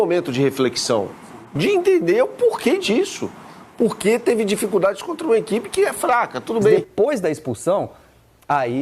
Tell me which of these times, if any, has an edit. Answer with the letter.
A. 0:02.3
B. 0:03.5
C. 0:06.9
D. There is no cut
C